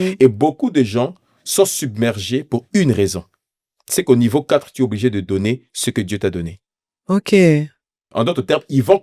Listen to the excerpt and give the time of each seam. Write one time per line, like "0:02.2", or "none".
0:08.1